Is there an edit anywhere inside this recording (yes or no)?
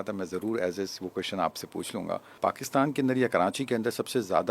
yes